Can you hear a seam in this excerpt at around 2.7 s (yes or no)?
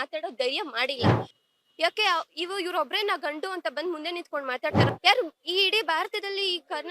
no